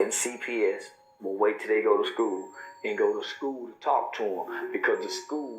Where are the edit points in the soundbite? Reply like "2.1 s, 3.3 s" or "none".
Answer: none

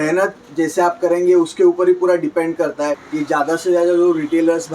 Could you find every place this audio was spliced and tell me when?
3.0 s

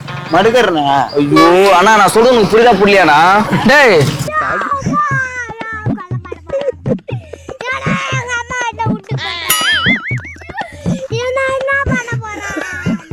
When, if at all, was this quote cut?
none

